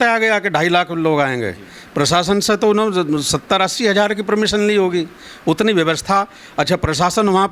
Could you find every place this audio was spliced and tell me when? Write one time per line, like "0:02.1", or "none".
none